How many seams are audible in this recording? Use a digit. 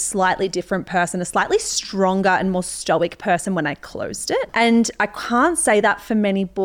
1